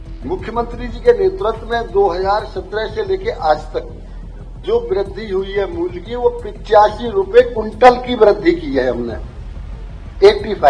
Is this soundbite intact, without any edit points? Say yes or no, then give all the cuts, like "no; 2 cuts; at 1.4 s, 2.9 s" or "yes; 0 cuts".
yes; 0 cuts